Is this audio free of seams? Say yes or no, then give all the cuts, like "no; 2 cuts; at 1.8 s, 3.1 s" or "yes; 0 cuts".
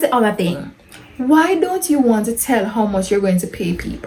yes; 0 cuts